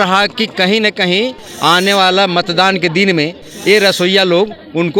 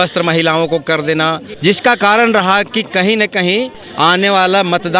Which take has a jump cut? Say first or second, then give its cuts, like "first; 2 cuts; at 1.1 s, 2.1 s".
second; 1 cut; at 1.5 s